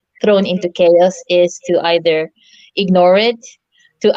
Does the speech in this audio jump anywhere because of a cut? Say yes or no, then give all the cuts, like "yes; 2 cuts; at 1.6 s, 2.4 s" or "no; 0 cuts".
no; 0 cuts